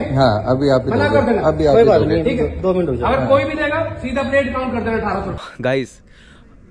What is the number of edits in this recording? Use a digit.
1